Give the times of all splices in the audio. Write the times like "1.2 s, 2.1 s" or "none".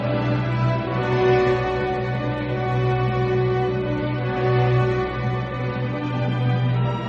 none